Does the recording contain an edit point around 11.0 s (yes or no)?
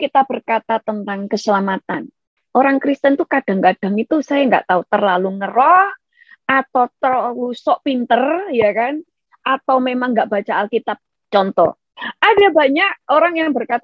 yes